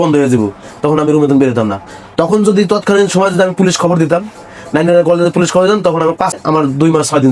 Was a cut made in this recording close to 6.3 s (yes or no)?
yes